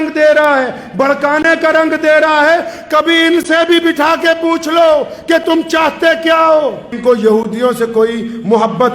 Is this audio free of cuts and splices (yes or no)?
no